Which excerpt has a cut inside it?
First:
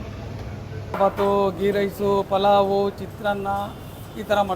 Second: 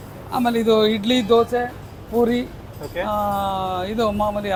first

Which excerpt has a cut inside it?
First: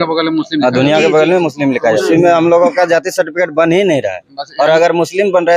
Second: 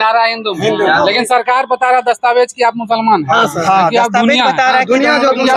first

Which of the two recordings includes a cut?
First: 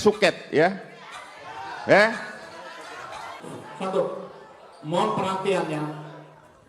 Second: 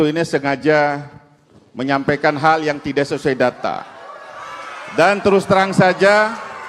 first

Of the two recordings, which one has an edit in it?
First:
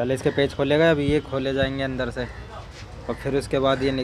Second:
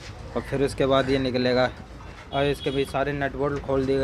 second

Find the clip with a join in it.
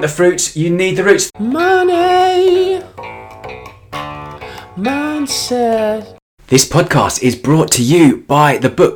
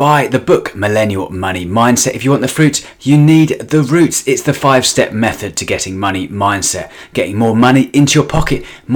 first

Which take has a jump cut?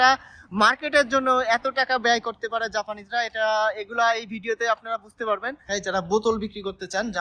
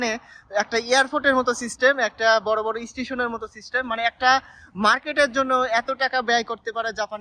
first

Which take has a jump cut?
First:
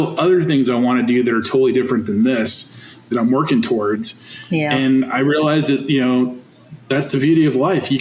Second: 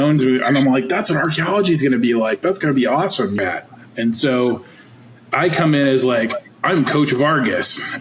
second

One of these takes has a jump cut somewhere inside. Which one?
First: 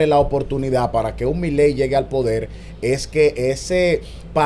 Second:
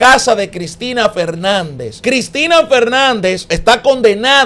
second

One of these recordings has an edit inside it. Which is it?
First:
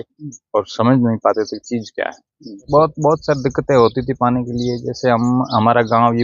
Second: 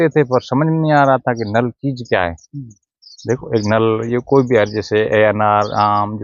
first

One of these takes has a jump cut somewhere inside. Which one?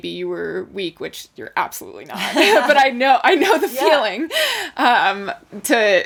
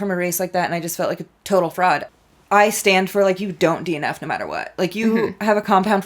second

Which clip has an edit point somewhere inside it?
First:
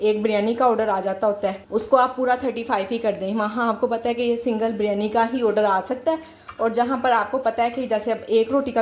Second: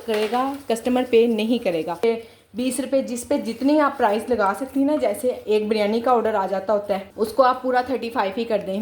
second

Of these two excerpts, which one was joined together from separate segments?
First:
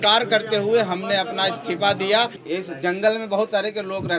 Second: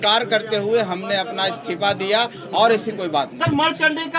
first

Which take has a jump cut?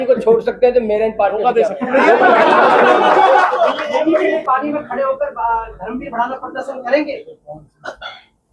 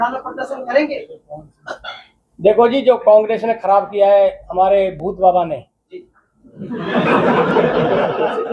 first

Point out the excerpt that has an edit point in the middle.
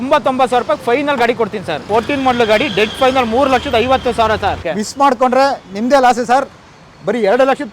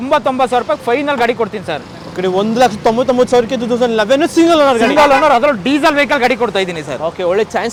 first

